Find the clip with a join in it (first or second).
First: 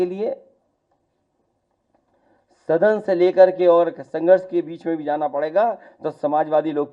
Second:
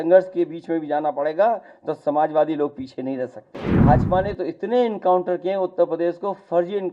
second